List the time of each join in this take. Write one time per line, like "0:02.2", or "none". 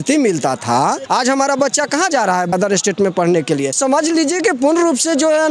0:01.0
0:02.5
0:03.8